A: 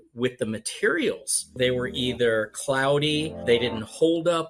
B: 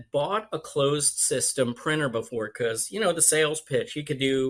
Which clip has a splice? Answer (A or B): A